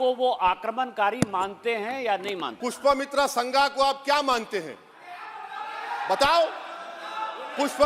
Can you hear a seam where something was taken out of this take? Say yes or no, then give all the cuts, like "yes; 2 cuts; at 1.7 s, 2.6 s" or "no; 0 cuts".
yes; 1 cut; at 2.5 s